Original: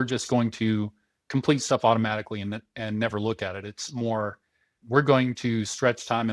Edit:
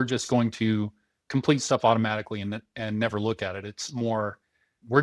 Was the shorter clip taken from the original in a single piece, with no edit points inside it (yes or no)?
yes